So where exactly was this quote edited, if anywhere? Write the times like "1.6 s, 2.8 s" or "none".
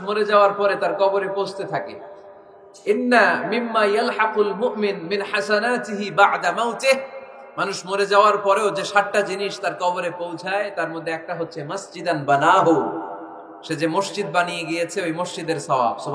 none